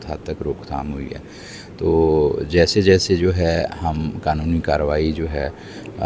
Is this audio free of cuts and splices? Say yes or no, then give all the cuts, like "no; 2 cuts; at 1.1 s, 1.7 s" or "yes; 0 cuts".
yes; 0 cuts